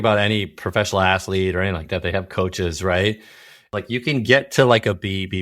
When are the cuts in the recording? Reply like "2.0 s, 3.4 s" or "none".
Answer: 3.7 s